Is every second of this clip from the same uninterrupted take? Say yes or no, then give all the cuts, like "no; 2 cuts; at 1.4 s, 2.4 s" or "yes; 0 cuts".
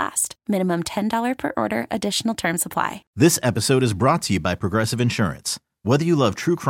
no; 1 cut; at 3.0 s